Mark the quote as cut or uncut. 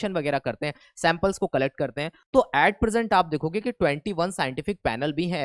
cut